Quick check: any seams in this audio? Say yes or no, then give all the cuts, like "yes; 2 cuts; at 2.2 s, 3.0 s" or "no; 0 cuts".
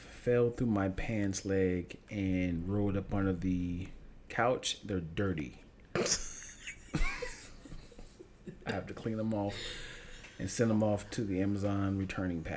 no; 0 cuts